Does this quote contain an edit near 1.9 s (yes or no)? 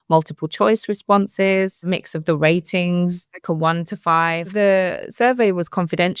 yes